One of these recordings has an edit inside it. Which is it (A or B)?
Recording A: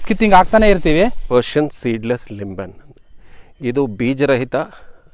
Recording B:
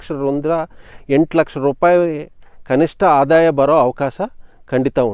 A